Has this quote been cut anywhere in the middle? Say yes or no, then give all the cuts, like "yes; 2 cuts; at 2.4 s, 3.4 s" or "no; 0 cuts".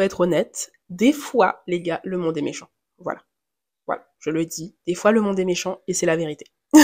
no; 0 cuts